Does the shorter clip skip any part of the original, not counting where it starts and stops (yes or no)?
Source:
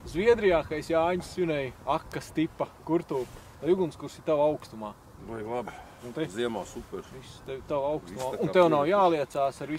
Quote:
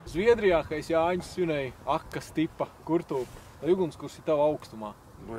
no